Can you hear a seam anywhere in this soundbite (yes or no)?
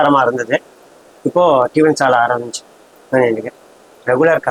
no